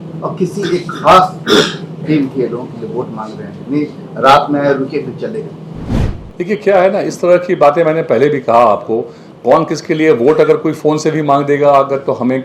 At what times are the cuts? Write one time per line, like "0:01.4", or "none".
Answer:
none